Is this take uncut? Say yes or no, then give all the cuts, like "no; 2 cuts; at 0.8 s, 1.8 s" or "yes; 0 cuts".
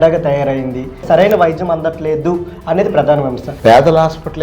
no; 2 cuts; at 1.0 s, 3.5 s